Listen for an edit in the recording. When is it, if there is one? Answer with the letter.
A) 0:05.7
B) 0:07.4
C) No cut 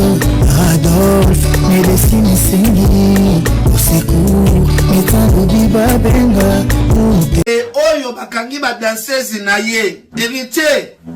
B